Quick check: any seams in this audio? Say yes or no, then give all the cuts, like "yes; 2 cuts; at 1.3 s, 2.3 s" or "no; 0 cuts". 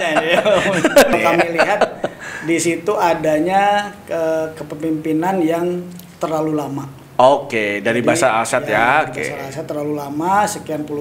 yes; 1 cut; at 1.1 s